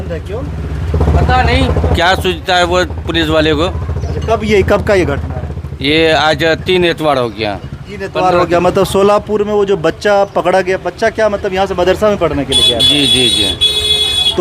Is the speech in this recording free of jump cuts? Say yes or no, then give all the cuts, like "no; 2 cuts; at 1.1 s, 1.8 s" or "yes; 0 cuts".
yes; 0 cuts